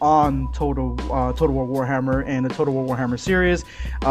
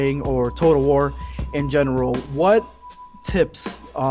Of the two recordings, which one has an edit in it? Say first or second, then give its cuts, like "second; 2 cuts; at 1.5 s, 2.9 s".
first; 1 cut; at 1.0 s